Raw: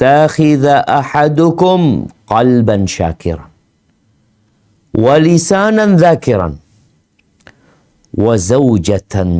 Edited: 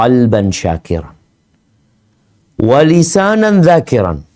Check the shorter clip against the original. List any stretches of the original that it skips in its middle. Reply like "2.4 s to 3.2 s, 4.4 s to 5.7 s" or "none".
none